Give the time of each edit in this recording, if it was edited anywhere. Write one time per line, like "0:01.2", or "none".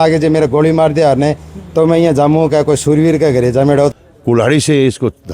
0:04.1